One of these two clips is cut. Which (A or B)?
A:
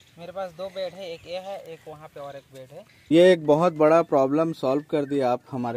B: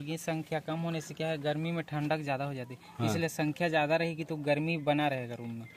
A